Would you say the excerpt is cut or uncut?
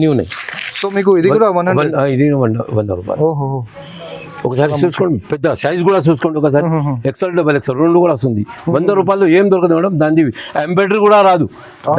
uncut